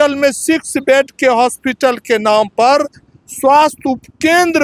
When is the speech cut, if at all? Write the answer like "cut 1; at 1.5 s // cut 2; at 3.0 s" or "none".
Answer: none

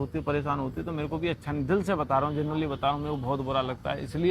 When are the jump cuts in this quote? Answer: none

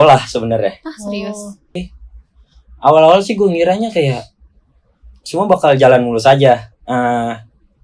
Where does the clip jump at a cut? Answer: cut 1; at 1.8 s

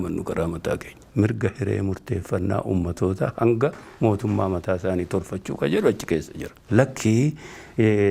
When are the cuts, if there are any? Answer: cut 1; at 1.0 s // cut 2; at 6.5 s

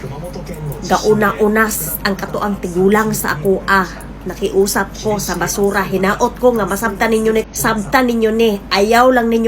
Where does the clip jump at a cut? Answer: cut 1; at 7.5 s

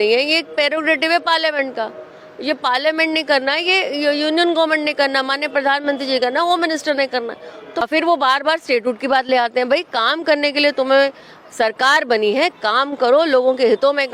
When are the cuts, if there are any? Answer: cut 1; at 7.9 s

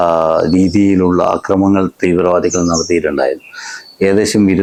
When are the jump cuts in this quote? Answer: none

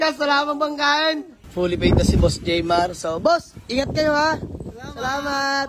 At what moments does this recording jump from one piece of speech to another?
cut 1; at 1.4 s

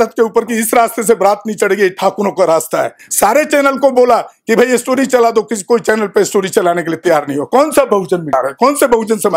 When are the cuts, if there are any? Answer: cut 1; at 3.0 s // cut 2; at 8.3 s

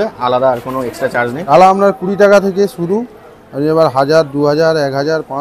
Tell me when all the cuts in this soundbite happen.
cut 1; at 1.5 s

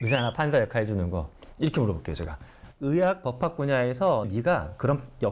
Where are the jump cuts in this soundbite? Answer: cut 1; at 1.3 s // cut 2; at 4.3 s

